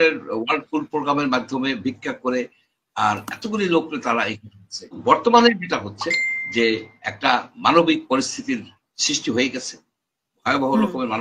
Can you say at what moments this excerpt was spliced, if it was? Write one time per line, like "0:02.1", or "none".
0:05.0